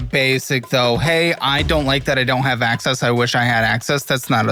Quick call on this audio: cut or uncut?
uncut